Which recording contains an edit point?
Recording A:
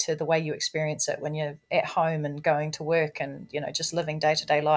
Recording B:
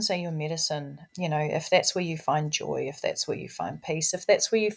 B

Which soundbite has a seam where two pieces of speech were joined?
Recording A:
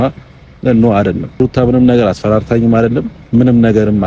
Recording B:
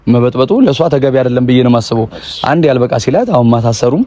A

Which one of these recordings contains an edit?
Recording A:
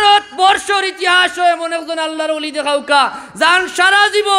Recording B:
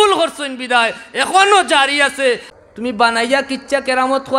B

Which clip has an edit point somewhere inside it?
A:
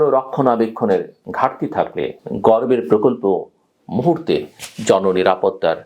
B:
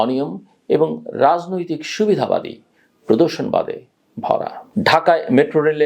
B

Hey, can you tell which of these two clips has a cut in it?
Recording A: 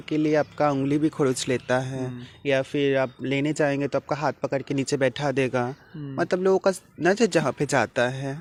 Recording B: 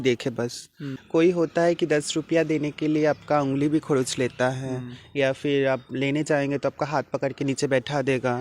B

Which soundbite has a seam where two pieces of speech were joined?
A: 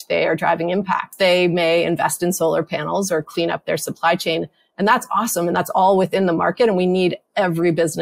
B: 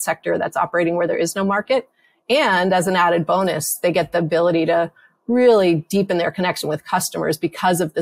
A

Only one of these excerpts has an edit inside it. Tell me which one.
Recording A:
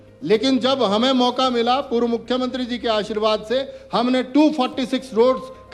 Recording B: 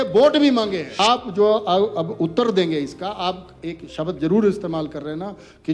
B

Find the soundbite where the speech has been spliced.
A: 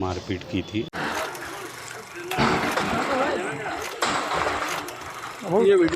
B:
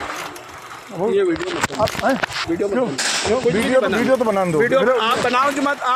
A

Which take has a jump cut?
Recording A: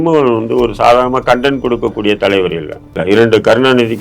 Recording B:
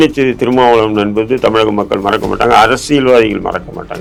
A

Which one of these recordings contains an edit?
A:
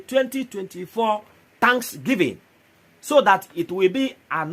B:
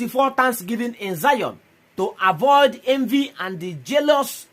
A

